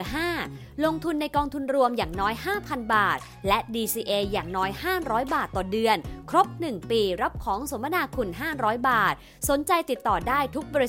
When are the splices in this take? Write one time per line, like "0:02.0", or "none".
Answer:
none